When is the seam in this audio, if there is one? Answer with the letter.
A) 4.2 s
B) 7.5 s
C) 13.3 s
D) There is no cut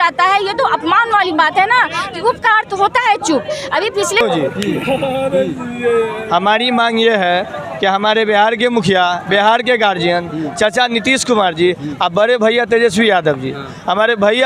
A